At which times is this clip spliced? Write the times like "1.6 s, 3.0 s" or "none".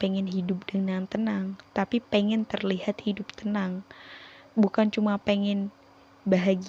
none